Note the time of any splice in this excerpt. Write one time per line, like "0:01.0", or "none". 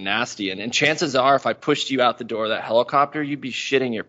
0:01.6